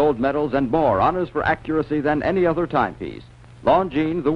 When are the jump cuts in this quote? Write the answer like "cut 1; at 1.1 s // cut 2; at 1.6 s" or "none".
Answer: cut 1; at 2.2 s